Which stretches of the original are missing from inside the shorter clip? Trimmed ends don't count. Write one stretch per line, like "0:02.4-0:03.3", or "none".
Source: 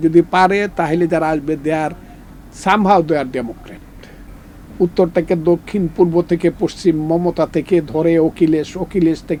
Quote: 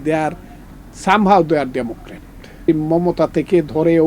0:04.2-0:06.8